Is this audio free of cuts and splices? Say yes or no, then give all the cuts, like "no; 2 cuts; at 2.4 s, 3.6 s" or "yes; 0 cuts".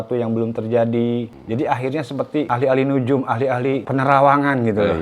no; 3 cuts; at 1.4 s, 2.5 s, 3.8 s